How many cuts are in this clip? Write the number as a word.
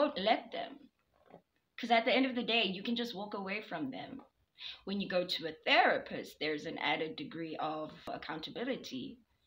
one